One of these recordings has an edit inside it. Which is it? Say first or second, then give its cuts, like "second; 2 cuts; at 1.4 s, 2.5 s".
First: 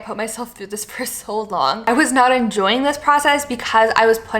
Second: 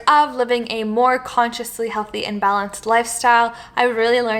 first; 1 cut; at 1.9 s